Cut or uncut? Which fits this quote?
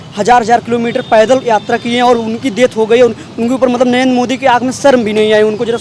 uncut